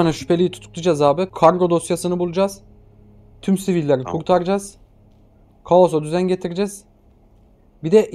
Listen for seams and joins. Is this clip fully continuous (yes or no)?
no